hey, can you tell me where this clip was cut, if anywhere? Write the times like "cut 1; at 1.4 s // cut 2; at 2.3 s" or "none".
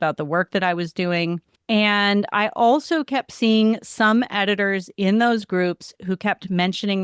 cut 1; at 1.5 s

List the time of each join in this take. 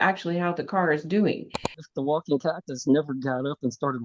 cut 1; at 1.8 s

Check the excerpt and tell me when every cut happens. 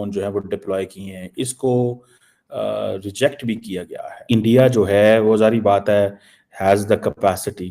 cut 1; at 4.1 s

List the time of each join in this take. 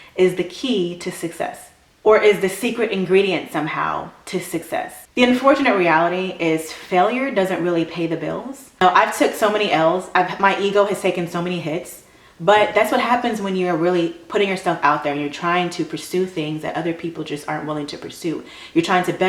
cut 1; at 8.6 s

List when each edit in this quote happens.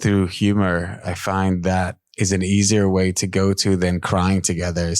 cut 1; at 2.0 s

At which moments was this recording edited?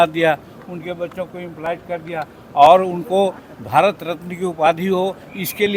none

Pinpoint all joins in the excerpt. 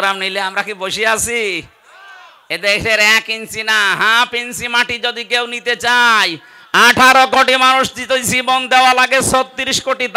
none

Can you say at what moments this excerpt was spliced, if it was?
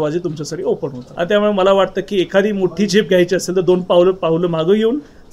cut 1; at 1.0 s

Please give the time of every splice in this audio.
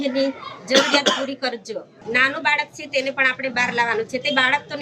cut 1; at 2.0 s

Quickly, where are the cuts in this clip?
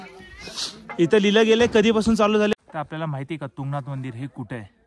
cut 1; at 2.5 s

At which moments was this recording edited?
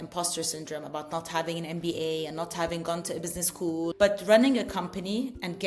cut 1; at 3.9 s

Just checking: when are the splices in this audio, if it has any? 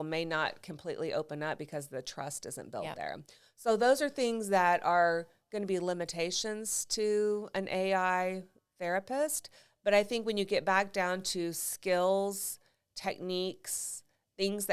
none

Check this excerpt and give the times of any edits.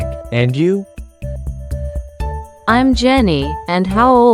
cut 1; at 0.9 s // cut 2; at 2.5 s

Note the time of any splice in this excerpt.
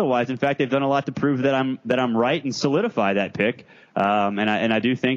none

